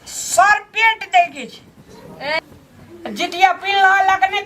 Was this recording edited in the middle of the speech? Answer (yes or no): yes